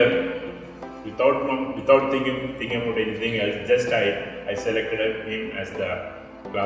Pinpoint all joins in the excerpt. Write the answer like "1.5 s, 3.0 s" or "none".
none